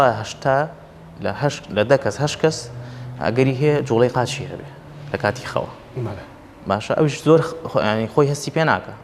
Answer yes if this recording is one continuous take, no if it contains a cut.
yes